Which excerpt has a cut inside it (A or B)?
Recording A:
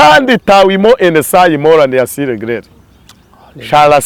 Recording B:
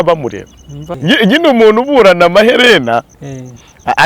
B